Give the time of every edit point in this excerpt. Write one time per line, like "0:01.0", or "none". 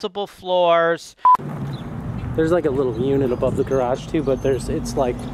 0:01.4